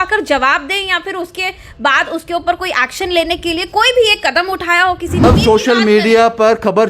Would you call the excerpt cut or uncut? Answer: cut